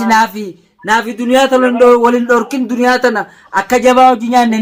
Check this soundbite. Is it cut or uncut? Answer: uncut